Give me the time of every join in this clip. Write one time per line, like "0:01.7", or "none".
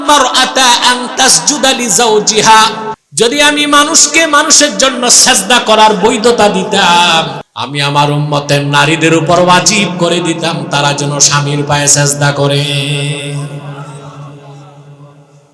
0:03.0
0:07.5